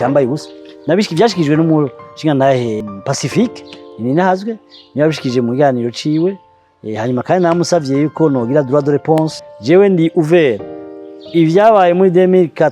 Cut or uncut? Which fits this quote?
cut